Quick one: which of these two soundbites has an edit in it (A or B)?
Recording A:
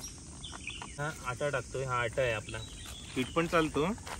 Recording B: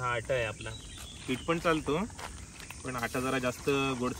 A